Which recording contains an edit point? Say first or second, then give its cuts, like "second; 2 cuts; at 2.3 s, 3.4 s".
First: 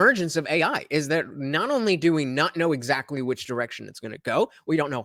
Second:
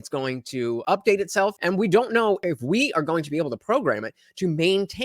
second; 3 cuts; at 0.8 s, 1.6 s, 2.4 s